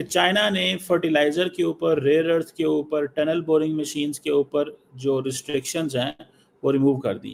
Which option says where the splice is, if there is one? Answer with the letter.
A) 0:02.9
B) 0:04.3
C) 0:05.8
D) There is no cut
D